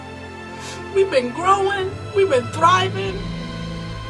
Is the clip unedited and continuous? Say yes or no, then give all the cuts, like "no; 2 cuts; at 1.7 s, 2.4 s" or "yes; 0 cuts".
no; 1 cut; at 0.9 s